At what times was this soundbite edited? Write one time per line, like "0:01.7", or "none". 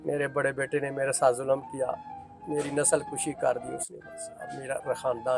none